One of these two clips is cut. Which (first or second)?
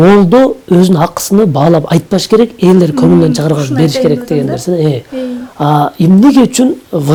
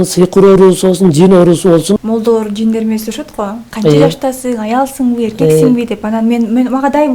second